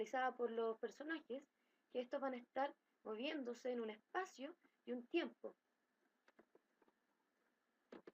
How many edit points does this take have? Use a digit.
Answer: 1